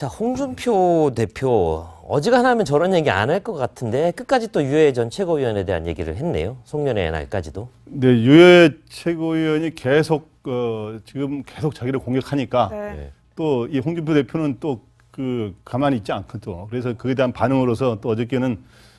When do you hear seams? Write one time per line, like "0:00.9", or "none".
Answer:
none